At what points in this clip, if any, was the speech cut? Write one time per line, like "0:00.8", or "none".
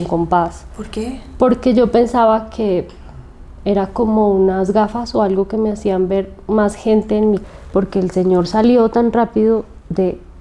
0:07.4